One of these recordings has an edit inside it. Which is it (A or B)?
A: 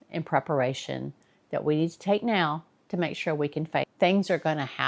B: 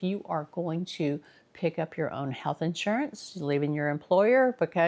A